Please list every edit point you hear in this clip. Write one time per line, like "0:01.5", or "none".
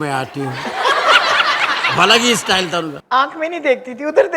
0:03.0